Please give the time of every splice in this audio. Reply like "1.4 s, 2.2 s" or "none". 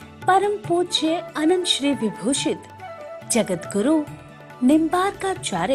2.4 s